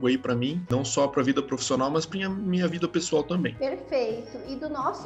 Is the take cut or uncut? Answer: uncut